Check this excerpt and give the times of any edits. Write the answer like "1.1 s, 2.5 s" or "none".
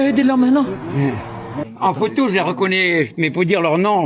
1.6 s

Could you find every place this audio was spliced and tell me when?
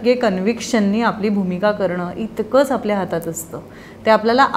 none

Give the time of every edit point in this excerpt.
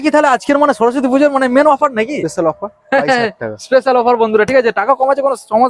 none

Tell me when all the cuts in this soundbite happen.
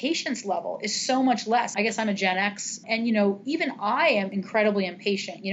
1.7 s, 2.8 s, 4.4 s

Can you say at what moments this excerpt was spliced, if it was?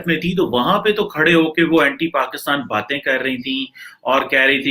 none

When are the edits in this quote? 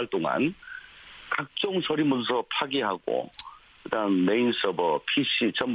3.8 s

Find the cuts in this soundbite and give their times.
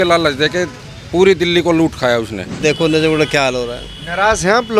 2.6 s

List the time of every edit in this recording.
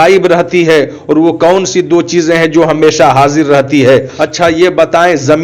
4.2 s

